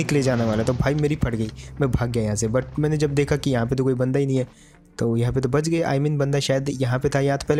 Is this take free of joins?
yes; 0 cuts

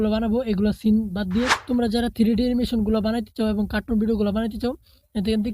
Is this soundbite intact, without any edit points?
no; 1 cut; at 1.6 s

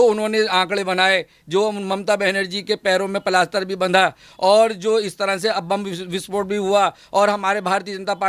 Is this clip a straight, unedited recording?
yes; 0 cuts

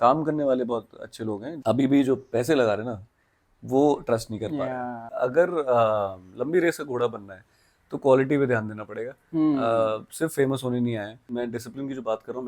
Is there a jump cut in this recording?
yes; 3 cuts; at 1.5 s, 5.0 s, 11.3 s

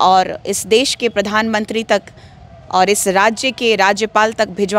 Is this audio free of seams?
yes; 0 cuts

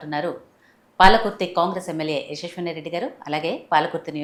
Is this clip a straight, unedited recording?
yes; 0 cuts

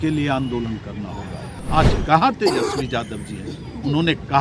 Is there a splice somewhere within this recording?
yes; 1 cut; at 1.5 s

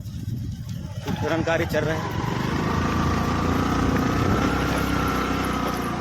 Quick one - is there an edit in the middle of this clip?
yes; 1 cut; at 4.5 s

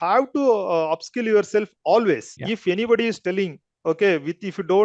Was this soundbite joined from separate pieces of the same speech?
yes; 1 cut; at 2.4 s

